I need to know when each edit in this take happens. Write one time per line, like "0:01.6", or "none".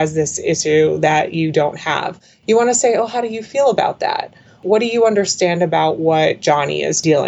0:04.6